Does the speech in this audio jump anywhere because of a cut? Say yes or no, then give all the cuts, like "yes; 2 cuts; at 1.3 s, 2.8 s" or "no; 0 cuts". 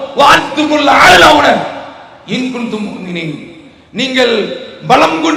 no; 0 cuts